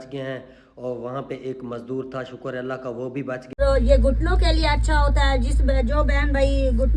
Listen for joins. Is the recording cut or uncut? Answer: cut